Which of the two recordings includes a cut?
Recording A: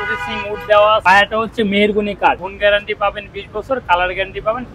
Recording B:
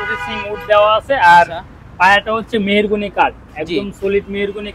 A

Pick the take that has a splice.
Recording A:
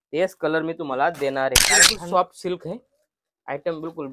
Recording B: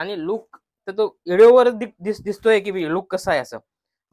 A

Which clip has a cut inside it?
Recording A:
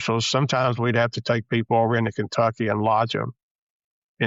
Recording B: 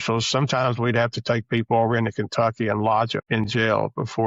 B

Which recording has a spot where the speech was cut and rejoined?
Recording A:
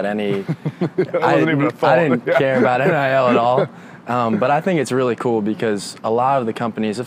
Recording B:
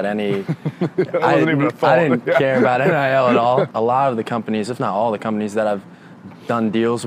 B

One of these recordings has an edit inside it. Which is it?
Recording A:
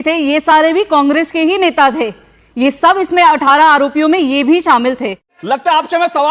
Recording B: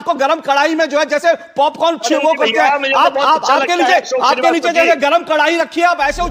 A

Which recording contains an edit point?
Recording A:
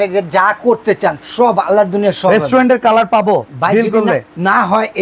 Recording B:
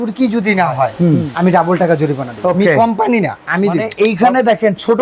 B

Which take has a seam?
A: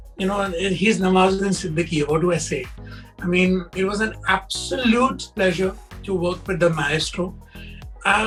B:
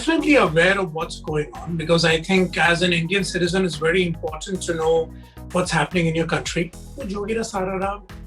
B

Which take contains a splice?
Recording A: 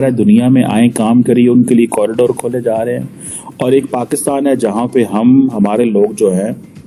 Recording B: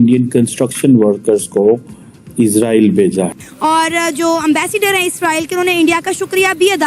B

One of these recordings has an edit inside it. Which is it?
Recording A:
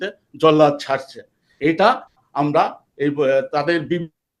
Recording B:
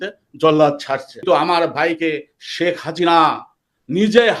B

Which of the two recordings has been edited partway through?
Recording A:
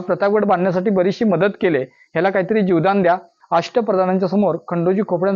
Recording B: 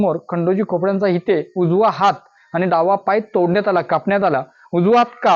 A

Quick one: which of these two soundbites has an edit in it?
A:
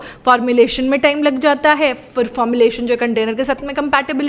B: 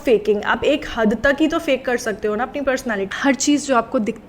B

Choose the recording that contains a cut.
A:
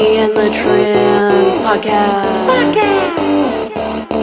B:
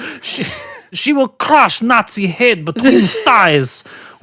B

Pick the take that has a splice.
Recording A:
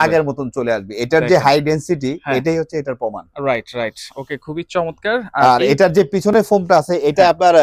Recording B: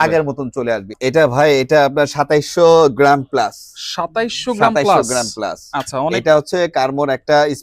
B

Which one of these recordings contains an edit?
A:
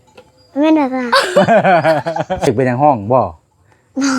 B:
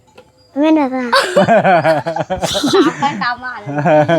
A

